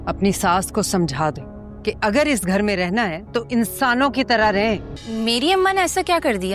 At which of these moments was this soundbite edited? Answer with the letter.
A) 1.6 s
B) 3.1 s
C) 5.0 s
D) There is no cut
C